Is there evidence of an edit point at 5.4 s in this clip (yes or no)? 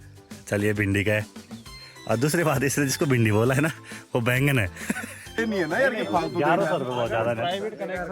yes